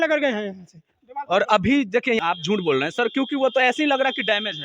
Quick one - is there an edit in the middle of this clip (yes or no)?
yes